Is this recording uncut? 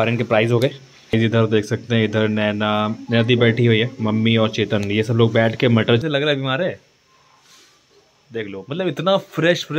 no; 2 cuts; at 1.1 s, 6.0 s

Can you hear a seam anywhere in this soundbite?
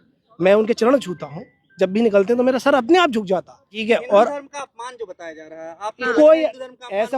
yes; 1 cut; at 3.7 s

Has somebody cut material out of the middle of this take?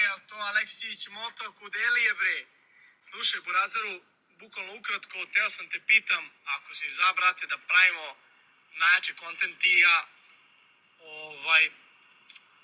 no; 0 cuts

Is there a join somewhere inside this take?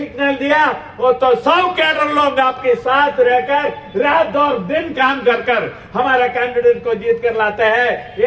no; 0 cuts

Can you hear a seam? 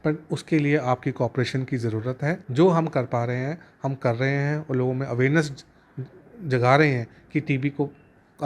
yes; 1 cut; at 2.4 s

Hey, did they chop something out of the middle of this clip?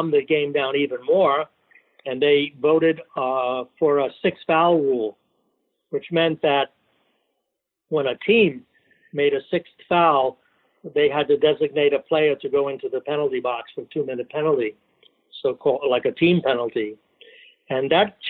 no; 0 cuts

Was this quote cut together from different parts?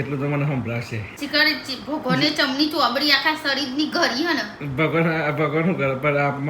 yes; 1 cut; at 1.1 s

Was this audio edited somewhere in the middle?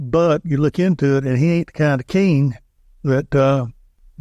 no; 0 cuts

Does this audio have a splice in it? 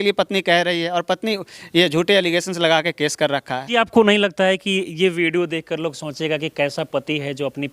yes; 1 cut; at 3.7 s

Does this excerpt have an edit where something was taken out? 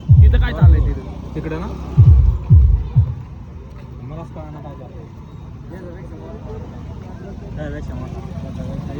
no; 0 cuts

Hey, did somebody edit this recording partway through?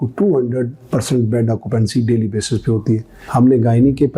yes; 1 cut; at 3.2 s

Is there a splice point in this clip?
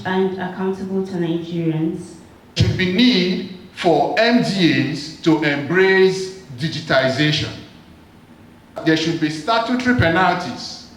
yes; 2 cuts; at 2.6 s, 8.8 s

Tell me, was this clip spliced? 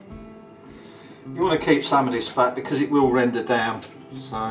yes; 1 cut; at 1.4 s

